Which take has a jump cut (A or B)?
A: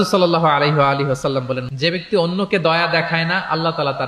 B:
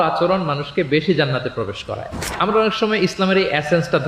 A